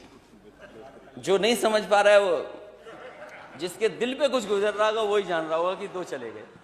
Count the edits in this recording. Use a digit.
0